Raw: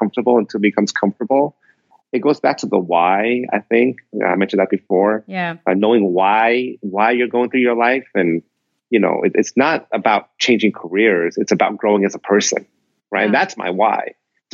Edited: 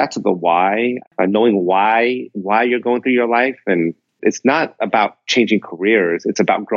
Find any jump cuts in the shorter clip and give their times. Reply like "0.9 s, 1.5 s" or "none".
1.0 s, 4.2 s